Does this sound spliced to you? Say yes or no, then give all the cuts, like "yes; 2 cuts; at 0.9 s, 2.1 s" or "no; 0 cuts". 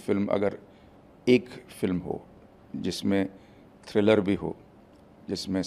no; 0 cuts